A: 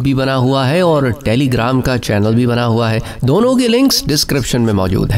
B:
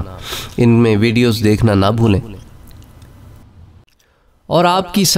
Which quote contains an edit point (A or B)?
B